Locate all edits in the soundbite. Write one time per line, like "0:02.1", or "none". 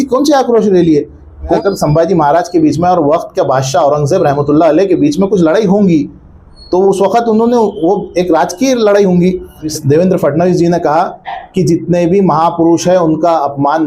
0:01.6
0:09.7